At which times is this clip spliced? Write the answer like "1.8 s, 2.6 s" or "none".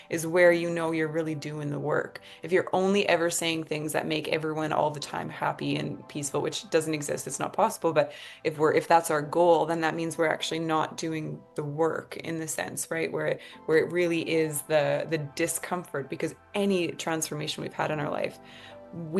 none